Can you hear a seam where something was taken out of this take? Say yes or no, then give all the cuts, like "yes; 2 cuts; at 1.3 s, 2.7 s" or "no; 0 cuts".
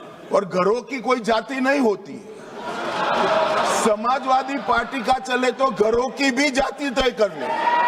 no; 0 cuts